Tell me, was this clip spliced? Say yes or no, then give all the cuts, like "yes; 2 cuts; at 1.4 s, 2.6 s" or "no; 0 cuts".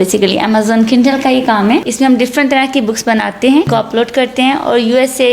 yes; 2 cuts; at 1.9 s, 3.7 s